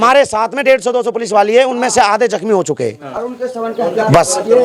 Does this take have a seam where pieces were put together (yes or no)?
no